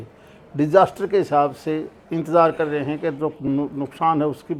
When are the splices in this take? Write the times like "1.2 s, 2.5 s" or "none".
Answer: none